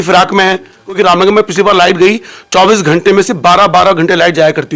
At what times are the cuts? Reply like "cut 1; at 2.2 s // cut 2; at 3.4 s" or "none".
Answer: cut 1; at 1.0 s